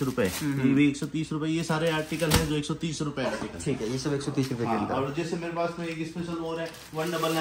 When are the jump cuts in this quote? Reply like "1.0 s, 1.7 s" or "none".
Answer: none

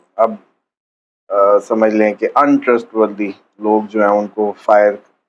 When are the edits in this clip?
none

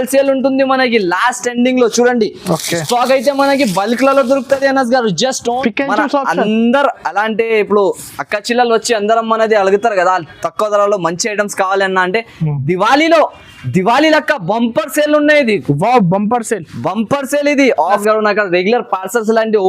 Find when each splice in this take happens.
5.6 s, 18.0 s

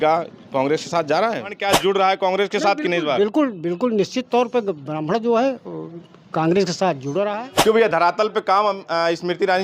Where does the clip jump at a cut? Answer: 1.5 s, 7.3 s

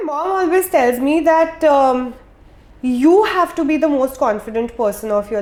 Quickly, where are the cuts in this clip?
none

